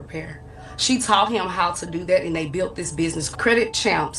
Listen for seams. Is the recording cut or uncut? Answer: cut